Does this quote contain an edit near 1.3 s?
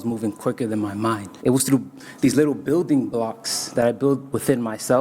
yes; 1 cut; at 1.3 s

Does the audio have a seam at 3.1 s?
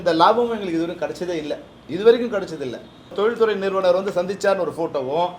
yes; 1 cut; at 3.1 s

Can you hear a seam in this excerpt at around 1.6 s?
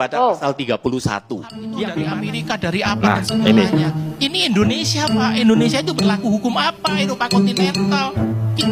yes; 1 cut; at 1.6 s

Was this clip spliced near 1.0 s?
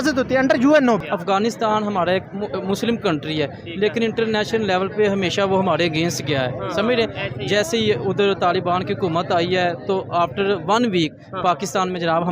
yes; 1 cut; at 1.0 s

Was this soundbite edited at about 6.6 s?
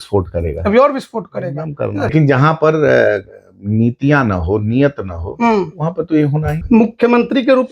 yes; 2 cuts; at 2.1 s, 6.6 s

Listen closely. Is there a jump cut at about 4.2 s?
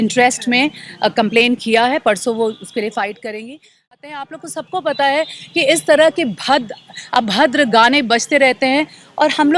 yes; 1 cut; at 4.2 s

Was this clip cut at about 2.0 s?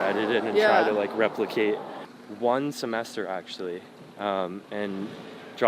yes; 1 cut; at 2.0 s

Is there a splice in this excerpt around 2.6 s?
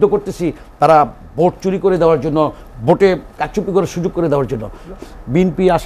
no; 1 cut; at 4.9 s

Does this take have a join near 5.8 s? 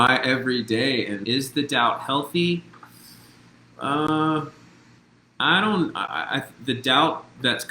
no; 1 cut; at 1.2 s

